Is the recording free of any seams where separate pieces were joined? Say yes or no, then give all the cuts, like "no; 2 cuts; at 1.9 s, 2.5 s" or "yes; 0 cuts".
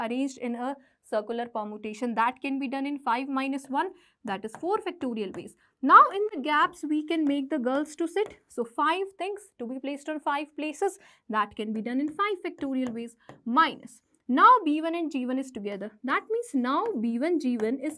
yes; 0 cuts